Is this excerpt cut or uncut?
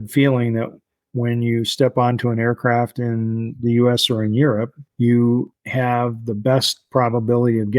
cut